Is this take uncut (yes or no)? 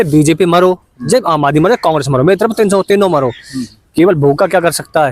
yes